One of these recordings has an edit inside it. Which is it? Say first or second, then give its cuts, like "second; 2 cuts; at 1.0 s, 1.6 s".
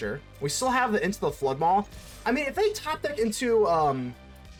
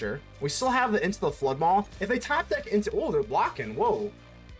second; 1 cut; at 1.9 s